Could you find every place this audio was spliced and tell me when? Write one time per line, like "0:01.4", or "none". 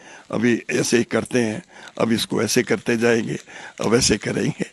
none